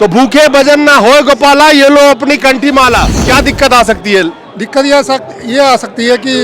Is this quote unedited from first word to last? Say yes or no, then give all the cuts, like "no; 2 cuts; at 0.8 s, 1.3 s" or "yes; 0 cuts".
no; 1 cut; at 3.2 s